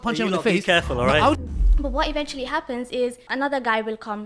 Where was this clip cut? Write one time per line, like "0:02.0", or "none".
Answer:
0:01.4
0:03.2